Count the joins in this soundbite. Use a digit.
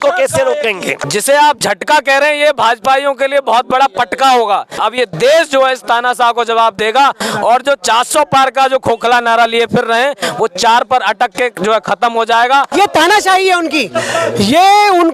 3